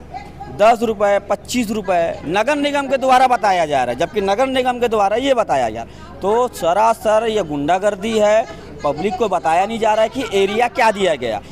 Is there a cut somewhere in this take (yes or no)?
no